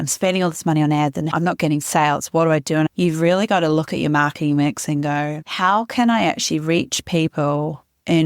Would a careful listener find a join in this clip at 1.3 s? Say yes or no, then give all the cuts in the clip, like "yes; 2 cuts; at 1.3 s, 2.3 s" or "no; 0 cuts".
yes; 2 cuts; at 1.3 s, 2.9 s